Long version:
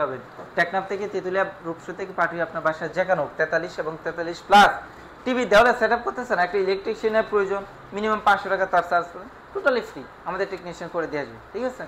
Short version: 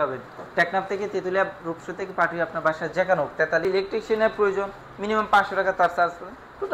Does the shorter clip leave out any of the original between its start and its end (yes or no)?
yes